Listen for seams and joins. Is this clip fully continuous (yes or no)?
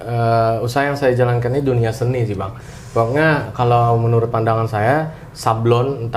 yes